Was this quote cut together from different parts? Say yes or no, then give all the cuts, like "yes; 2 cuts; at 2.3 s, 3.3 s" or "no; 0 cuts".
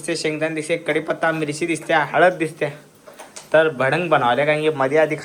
no; 0 cuts